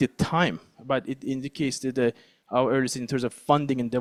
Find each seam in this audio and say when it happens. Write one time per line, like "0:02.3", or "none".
none